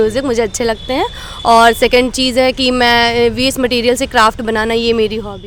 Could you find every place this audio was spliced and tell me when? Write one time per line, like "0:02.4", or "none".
none